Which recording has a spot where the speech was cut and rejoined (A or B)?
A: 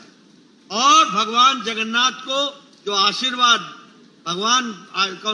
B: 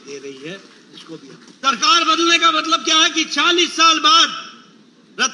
B